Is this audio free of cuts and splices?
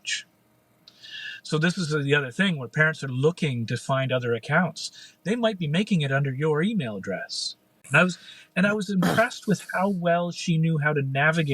no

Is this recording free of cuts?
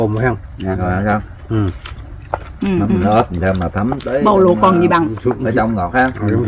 yes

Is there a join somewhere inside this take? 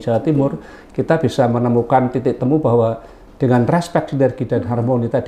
no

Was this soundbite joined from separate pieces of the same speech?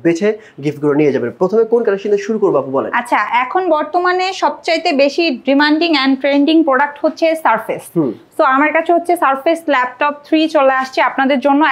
no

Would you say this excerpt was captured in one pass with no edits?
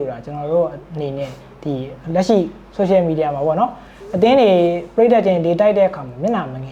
yes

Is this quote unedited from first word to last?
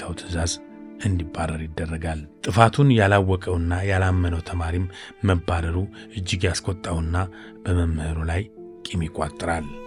yes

